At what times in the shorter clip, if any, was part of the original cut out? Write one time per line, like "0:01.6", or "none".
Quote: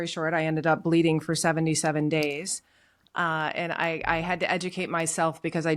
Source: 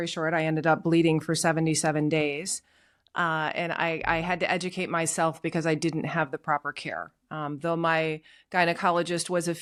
none